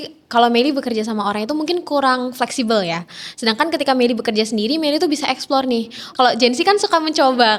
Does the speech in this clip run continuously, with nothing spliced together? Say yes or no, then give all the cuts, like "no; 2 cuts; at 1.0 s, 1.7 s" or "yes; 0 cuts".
no; 1 cut; at 6.1 s